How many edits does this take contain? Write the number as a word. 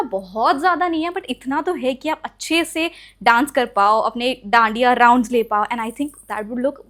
zero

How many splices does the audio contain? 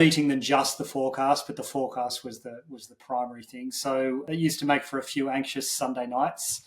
one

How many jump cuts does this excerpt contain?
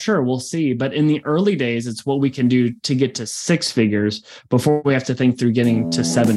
one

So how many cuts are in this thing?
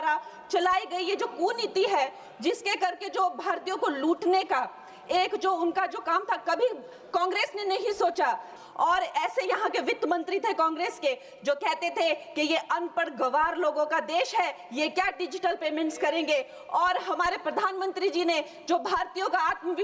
one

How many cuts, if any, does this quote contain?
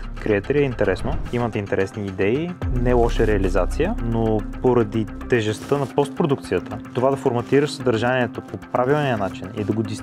three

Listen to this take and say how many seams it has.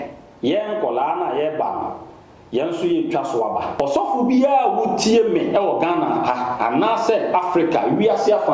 one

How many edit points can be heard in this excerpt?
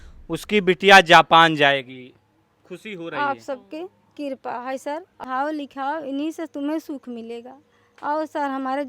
one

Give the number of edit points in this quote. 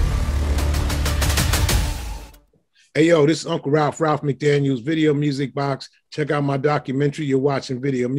one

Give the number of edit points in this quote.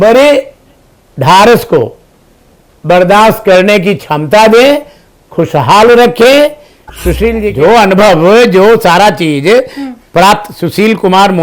one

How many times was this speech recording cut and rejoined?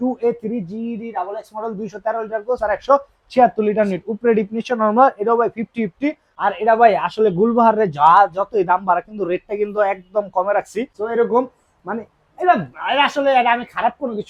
two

